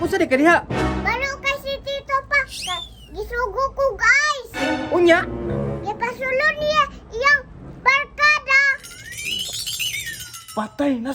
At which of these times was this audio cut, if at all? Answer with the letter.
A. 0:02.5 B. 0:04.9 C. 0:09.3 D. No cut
D